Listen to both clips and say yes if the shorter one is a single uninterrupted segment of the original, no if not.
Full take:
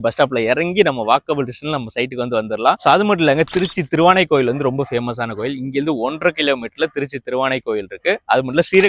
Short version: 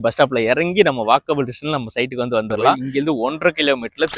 no